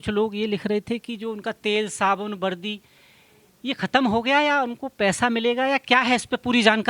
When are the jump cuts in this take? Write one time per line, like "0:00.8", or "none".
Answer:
none